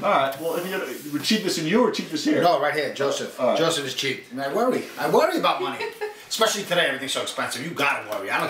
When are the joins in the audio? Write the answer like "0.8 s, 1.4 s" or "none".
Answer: 4.5 s

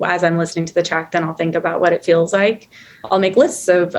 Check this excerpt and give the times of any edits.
3.0 s

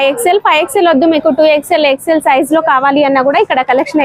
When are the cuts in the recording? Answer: none

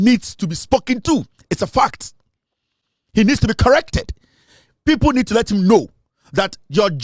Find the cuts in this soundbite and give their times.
none

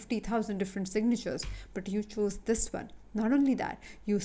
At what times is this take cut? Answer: none

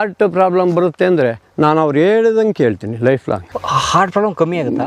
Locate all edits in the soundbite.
none

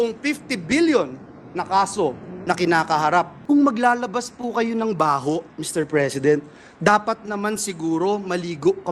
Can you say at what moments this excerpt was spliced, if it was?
3.4 s

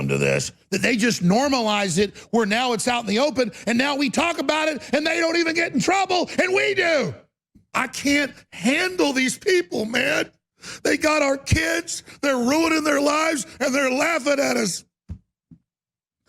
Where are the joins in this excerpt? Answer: 7.6 s

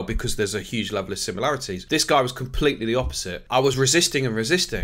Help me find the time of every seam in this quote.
1.7 s, 3.7 s

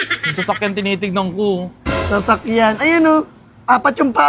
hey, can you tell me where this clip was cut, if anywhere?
none

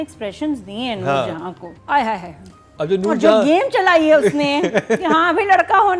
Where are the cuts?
1.7 s

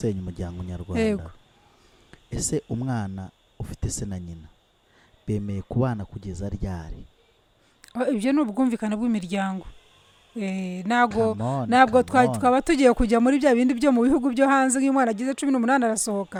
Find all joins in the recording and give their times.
none

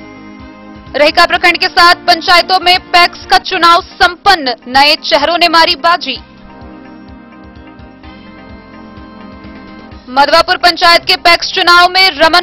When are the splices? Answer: none

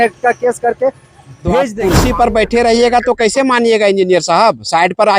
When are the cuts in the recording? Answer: 1.7 s

